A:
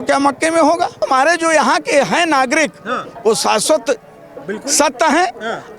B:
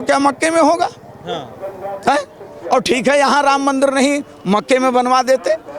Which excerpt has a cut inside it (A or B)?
A